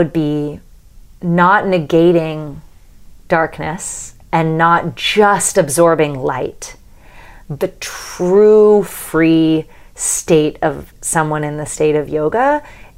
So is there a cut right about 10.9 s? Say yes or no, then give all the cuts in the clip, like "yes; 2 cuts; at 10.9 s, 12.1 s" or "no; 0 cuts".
yes; 2 cuts; at 7.5 s, 10.9 s